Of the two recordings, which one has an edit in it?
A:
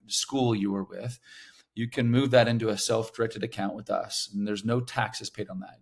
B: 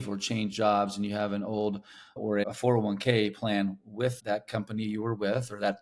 B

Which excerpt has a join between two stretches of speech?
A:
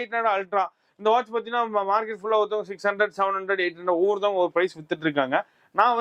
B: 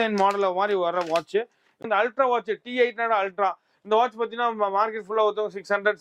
B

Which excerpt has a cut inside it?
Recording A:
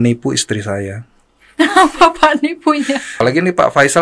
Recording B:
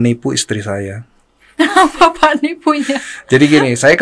A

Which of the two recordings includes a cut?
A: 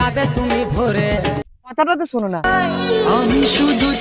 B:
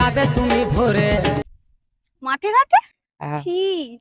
A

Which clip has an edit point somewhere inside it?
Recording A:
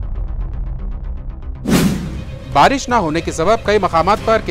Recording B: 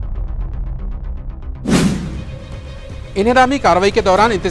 B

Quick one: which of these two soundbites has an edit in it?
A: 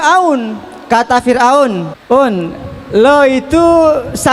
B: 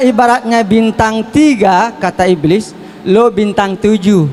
A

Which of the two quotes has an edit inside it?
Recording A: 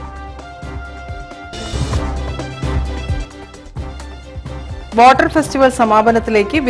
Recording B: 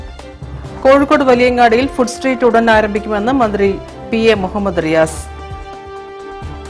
A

